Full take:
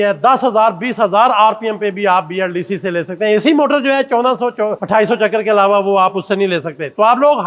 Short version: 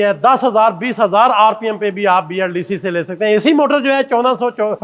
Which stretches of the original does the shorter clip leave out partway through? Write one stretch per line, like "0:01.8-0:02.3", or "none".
none

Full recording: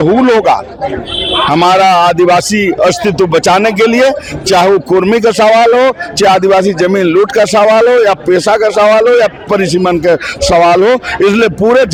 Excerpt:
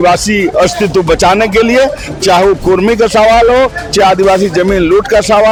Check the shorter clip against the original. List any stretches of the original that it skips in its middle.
none

